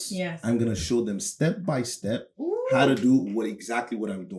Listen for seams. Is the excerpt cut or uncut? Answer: uncut